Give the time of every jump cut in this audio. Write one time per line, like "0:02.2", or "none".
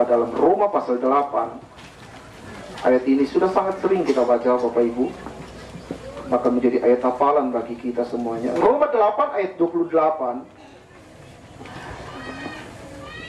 none